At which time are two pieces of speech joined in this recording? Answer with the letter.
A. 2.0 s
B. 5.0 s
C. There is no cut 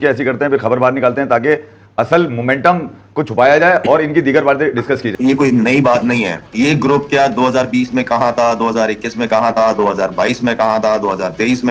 B